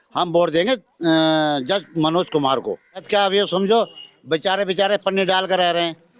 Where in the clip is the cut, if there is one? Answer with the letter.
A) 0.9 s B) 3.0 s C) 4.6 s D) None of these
B